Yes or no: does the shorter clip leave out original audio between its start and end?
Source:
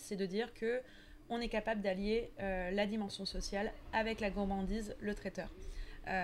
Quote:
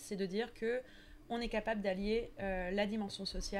no